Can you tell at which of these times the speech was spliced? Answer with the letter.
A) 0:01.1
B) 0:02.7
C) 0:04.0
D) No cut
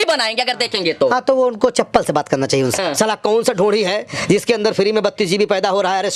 B